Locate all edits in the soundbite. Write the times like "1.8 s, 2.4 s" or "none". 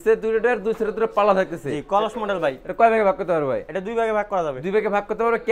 none